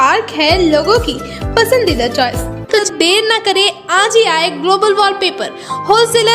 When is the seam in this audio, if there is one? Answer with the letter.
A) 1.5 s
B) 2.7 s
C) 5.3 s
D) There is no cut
B